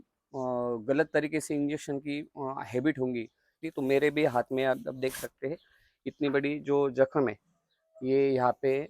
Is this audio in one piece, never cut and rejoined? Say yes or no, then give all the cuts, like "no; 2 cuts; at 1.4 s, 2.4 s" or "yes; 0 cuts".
no; 1 cut; at 3.6 s